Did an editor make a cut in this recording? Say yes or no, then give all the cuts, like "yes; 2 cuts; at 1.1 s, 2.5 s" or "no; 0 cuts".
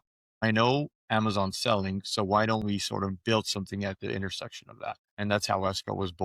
yes; 1 cut; at 5.1 s